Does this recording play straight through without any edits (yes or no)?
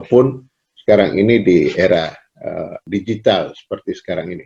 no